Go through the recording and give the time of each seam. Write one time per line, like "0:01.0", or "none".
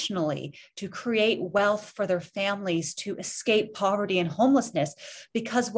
none

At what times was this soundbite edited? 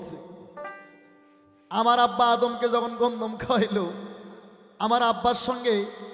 none

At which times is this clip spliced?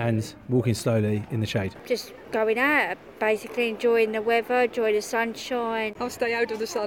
0:02.0
0:06.0

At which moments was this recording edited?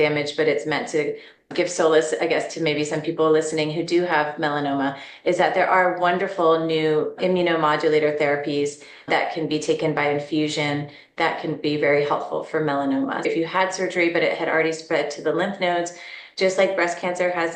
0:13.2

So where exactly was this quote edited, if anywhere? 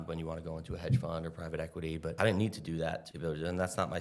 0:02.1
0:03.1

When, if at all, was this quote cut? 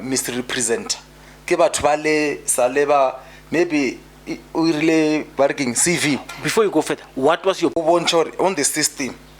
0:07.8

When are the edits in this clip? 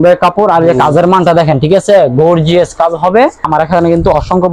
0:03.5

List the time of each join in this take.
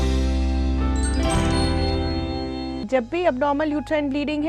0:02.9

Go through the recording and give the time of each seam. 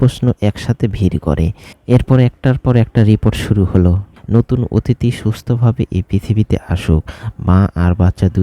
0:01.7
0:04.1

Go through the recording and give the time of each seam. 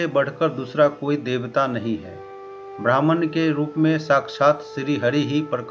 none

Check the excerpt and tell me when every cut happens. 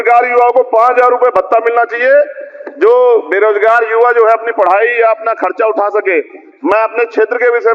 none

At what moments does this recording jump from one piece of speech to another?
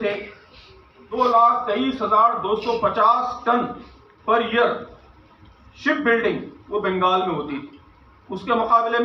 0:01.0

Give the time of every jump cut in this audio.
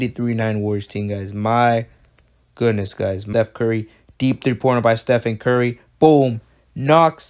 0:03.2

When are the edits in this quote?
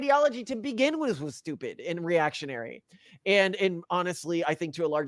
none

